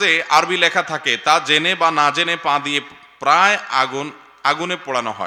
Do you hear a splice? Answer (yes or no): no